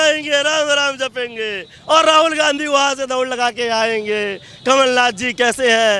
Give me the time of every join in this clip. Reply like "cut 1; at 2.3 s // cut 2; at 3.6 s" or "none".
cut 1; at 1.7 s